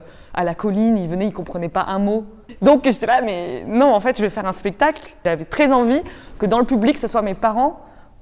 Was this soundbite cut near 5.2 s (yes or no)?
yes